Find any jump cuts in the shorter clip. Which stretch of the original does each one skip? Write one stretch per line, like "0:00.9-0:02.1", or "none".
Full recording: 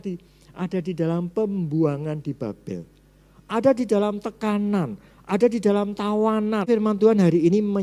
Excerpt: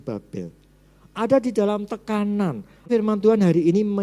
0:05.2-0:06.6